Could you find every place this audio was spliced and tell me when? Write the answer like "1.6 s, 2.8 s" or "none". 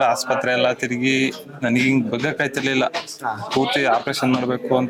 none